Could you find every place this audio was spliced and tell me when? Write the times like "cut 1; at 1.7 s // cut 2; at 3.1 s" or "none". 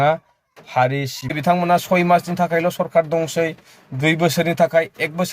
cut 1; at 1.3 s